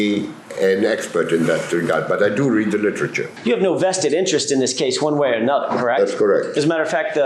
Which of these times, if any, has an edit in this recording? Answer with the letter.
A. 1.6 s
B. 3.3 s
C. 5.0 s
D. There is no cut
B